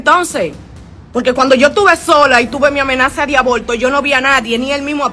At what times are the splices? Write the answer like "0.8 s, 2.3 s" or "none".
none